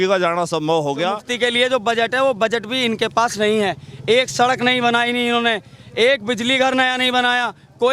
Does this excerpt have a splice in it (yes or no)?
yes